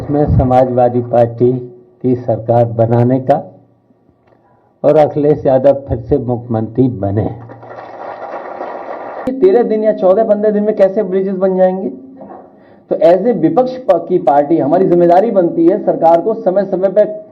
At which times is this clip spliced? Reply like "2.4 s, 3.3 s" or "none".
9.3 s